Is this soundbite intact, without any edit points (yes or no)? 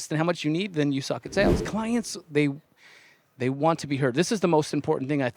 no